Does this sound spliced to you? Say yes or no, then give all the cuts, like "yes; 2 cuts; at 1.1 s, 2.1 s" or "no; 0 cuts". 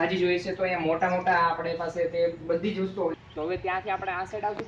yes; 1 cut; at 3.1 s